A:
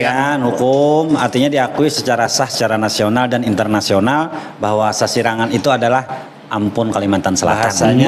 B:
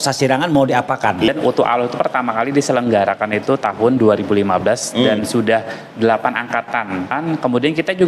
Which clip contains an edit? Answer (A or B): B